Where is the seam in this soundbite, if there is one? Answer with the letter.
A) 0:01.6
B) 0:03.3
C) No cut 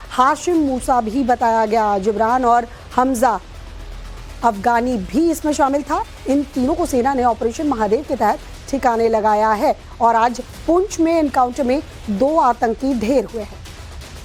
C